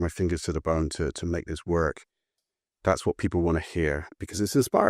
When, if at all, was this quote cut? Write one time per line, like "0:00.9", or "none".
0:02.3